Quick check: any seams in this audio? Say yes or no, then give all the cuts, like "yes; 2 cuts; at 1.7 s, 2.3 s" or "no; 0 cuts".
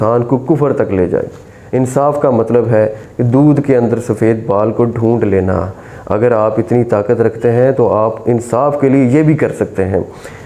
yes; 1 cut; at 1.5 s